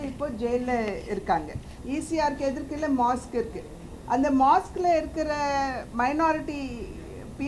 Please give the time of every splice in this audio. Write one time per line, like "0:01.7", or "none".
0:01.7